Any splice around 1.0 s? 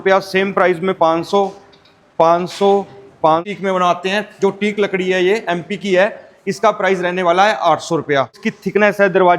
no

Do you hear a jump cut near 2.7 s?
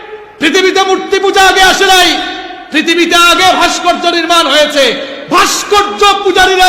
no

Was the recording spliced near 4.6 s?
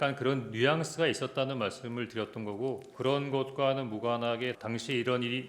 yes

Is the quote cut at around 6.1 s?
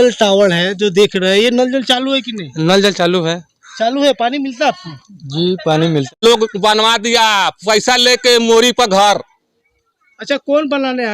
yes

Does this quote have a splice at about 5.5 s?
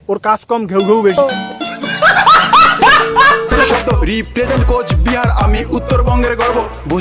no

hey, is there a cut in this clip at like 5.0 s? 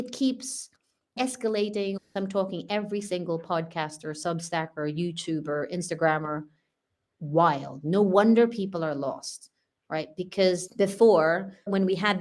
no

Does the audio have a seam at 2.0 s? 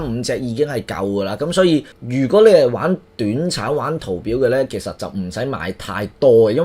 yes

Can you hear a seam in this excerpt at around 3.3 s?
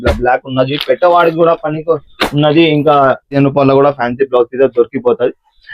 yes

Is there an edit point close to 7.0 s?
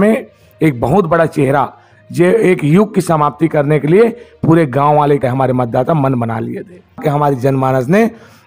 yes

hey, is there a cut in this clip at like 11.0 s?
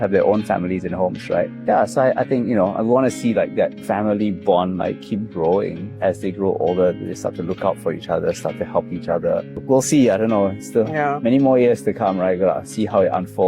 no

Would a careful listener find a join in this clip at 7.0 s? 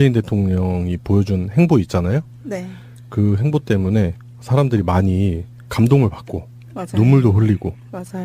no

